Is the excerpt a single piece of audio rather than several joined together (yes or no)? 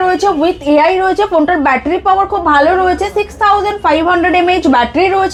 yes